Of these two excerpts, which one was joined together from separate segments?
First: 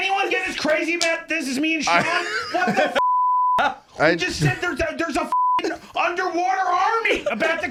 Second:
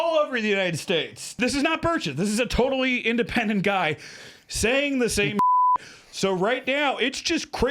second; 1 cut; at 1.3 s

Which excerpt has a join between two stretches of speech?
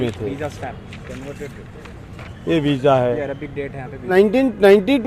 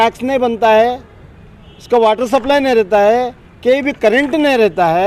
first; 1 cut; at 4.1 s

